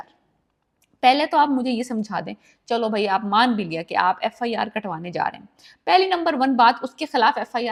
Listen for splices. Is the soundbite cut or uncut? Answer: uncut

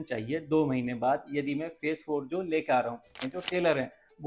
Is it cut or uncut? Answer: cut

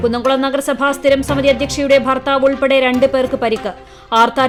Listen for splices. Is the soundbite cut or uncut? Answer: uncut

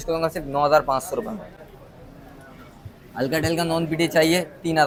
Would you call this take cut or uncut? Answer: uncut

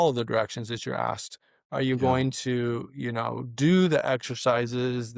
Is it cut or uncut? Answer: uncut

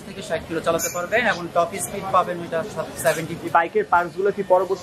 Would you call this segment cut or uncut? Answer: cut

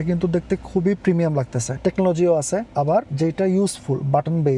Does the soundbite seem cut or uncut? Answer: cut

